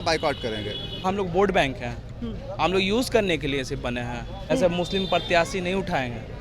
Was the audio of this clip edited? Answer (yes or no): yes